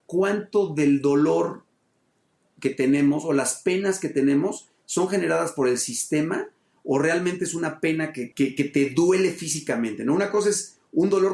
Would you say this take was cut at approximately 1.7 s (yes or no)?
no